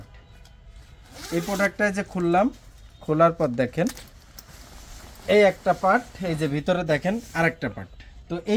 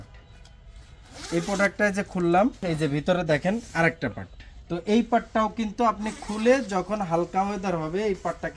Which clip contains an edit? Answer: second; 1 cut; at 2.6 s

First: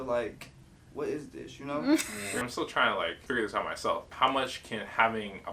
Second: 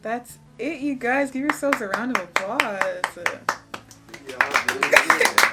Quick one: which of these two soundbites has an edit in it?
first; 3 cuts; at 2.2 s, 3.2 s, 4.1 s

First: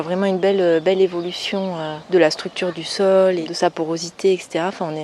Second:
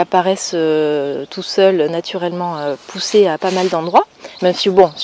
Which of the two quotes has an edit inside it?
first; 2 cuts; at 1.9 s, 3.5 s

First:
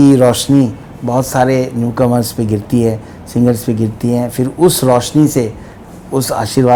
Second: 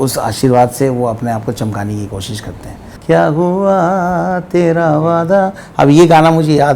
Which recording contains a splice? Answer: second; 1 cut; at 2.9 s

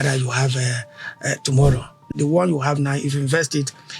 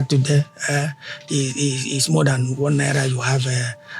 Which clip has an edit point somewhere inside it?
first; 1 cut; at 2.1 s

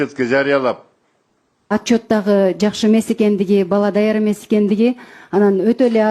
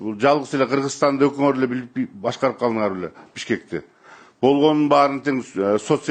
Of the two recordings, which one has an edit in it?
first; 1 cut; at 1.5 s

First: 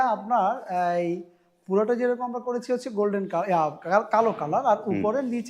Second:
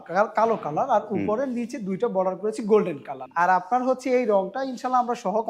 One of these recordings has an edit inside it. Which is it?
second; 1 cut; at 3.2 s

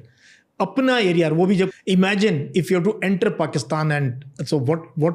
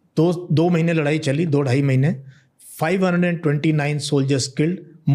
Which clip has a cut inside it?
first; 1 cut; at 1.7 s

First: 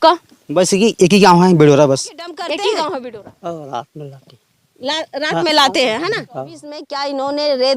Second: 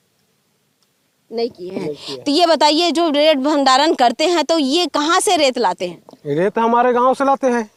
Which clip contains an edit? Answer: first; 2 cuts; at 3.1 s, 6.9 s

